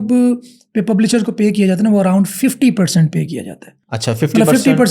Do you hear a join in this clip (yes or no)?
no